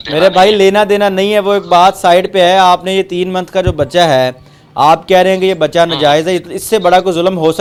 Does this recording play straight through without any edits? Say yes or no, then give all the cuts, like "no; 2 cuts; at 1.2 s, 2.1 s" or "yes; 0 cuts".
yes; 0 cuts